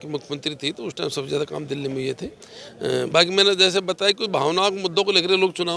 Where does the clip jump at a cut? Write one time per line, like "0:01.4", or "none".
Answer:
none

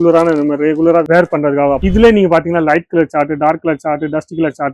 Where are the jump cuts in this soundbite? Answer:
0:01.8

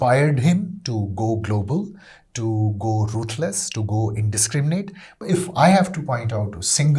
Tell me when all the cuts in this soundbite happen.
0:05.2

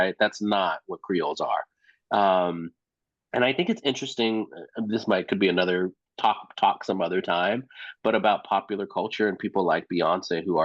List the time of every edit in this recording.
none

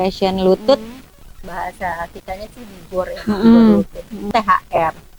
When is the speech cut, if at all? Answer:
0:04.3

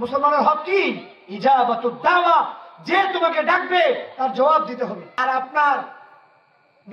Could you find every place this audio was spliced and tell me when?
0:05.1

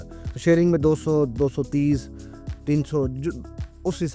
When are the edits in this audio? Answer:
none

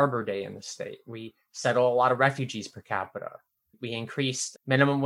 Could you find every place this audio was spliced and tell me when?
none

